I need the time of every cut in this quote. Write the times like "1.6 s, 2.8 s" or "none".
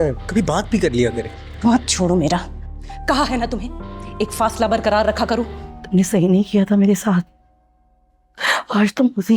5.6 s